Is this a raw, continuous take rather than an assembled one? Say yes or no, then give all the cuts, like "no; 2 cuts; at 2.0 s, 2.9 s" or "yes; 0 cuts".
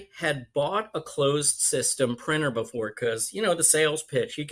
yes; 0 cuts